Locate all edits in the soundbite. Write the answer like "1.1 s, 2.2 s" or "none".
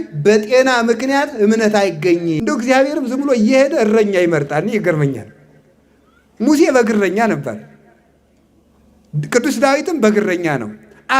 2.4 s